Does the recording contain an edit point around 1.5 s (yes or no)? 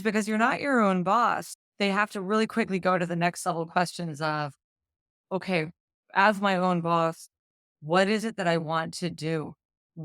yes